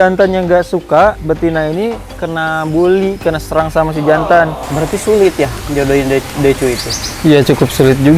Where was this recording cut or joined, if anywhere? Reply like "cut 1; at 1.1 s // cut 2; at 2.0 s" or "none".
cut 1; at 1.2 s // cut 2; at 2.1 s // cut 3; at 4.6 s